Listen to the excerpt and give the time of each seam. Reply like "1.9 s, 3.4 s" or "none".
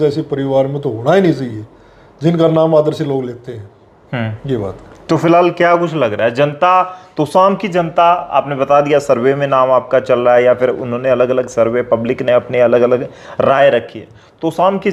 none